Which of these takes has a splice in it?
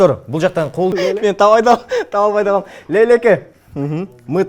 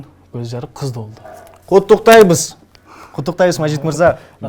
first; 1 cut; at 0.9 s

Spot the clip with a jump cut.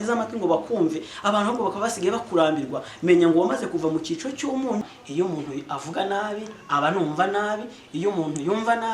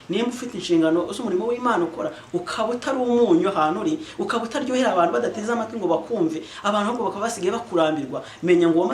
first; 1 cut; at 4.9 s

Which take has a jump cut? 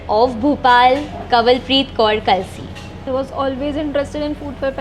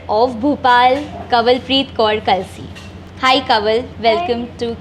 first; 1 cut; at 3.0 s

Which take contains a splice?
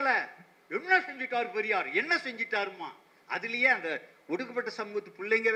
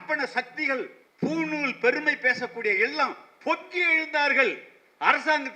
second; 1 cut; at 1.0 s

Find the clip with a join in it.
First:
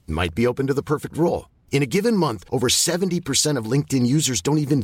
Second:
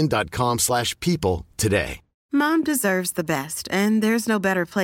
second; 1 cut; at 2.1 s

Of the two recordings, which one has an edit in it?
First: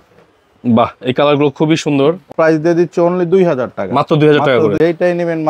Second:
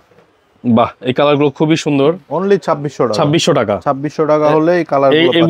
first; 2 cuts; at 2.3 s, 4.8 s

